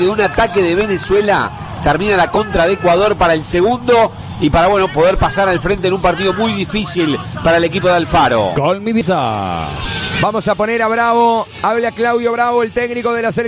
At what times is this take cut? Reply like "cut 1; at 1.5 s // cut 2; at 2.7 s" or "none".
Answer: cut 1; at 9.0 s